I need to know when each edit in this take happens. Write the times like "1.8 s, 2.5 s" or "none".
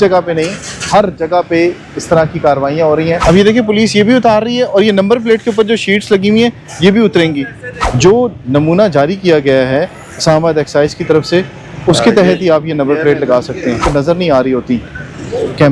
3.2 s, 7.8 s, 13.8 s